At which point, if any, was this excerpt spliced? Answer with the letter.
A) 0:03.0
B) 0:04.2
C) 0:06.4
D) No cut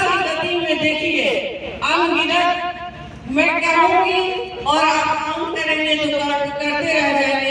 D